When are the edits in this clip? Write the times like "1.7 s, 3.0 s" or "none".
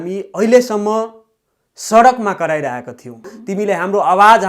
3.4 s